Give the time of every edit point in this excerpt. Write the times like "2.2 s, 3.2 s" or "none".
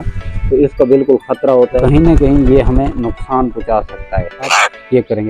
1.8 s, 4.5 s